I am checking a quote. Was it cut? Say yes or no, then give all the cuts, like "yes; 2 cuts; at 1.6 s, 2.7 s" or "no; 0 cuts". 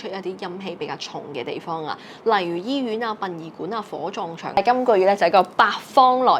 yes; 1 cut; at 4.6 s